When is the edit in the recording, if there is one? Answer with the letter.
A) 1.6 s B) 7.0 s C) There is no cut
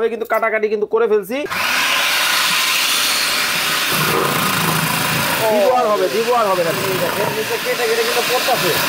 A